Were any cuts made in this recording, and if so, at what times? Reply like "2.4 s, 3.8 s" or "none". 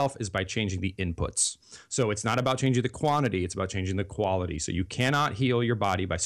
none